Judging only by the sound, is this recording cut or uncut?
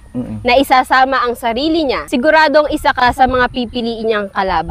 cut